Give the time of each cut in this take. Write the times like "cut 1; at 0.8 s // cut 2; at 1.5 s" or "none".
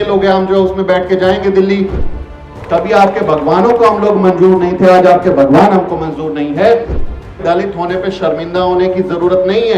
cut 1; at 2.4 s // cut 2; at 6.9 s